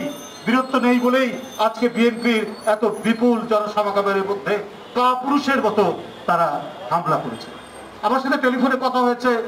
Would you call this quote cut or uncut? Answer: uncut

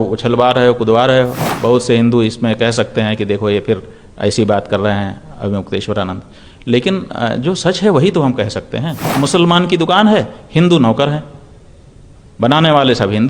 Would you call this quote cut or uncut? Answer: cut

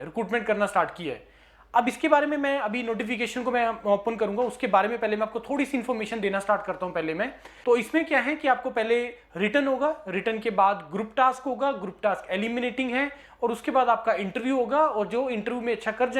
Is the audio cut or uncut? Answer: cut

